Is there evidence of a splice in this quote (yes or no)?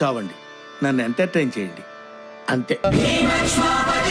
yes